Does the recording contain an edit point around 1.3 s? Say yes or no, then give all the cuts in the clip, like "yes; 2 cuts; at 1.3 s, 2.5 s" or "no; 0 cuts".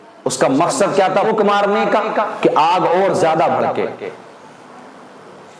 yes; 1 cut; at 1.3 s